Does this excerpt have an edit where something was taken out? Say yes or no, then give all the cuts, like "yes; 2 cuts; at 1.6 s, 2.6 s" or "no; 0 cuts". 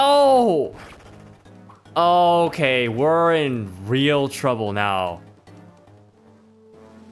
no; 0 cuts